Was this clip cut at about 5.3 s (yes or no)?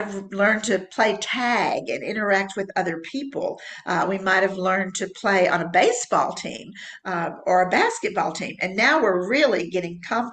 no